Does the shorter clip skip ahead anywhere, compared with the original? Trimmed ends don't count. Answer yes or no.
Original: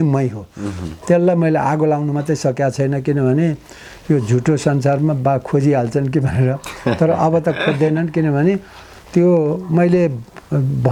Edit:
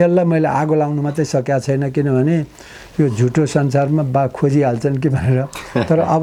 no